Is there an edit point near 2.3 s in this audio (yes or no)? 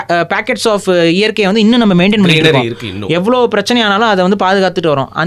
no